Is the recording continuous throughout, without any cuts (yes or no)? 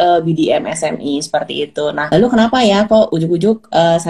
no